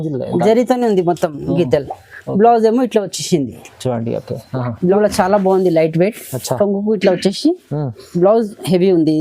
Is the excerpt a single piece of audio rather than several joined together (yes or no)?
no